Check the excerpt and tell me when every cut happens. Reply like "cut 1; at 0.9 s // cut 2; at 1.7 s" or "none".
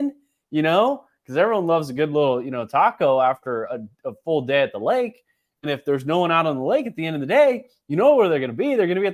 none